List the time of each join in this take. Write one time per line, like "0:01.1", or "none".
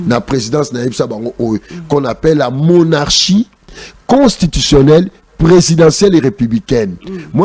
none